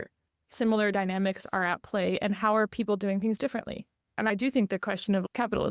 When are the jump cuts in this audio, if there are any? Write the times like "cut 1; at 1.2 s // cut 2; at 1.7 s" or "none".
cut 1; at 4.3 s